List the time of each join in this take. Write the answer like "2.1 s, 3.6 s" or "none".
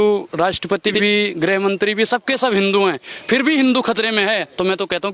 none